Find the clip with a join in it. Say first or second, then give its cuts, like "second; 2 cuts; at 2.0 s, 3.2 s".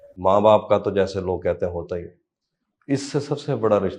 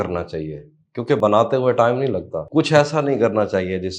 second; 2 cuts; at 1.2 s, 2.4 s